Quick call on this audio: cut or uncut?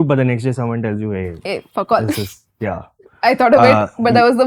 uncut